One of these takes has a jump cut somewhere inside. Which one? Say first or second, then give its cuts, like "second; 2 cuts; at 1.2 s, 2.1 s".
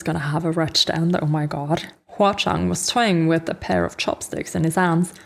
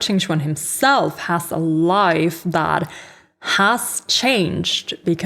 first; 1 cut; at 2.0 s